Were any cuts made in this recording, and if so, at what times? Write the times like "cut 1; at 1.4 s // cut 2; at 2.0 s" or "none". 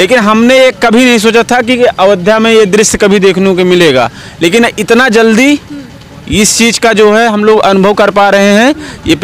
none